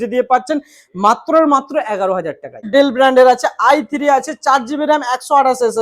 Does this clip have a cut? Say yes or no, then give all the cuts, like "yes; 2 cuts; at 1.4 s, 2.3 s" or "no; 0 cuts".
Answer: yes; 1 cut; at 2.6 s